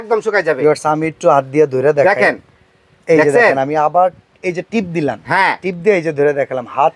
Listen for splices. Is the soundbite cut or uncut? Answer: uncut